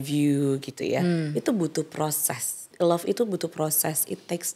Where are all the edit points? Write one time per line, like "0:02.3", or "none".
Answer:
0:02.7